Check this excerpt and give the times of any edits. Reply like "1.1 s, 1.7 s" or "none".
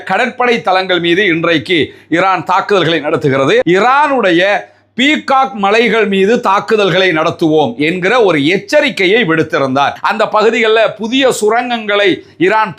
3.6 s, 9.9 s

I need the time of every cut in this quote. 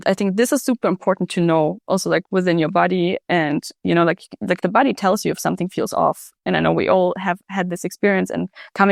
none

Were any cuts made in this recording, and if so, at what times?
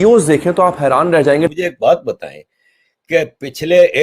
1.5 s

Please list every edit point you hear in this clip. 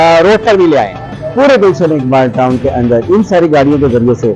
1.1 s

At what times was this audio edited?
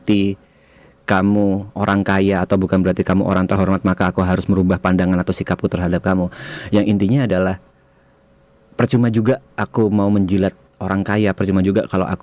none

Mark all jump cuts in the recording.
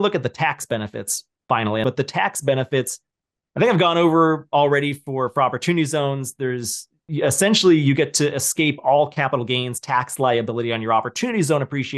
1.8 s

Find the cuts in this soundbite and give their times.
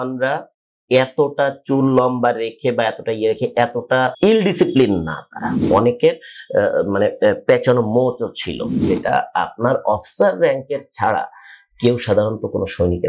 4.1 s, 5.6 s, 8.8 s

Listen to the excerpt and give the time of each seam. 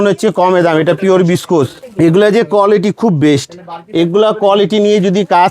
1.8 s

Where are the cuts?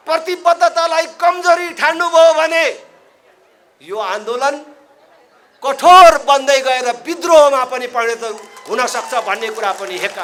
none

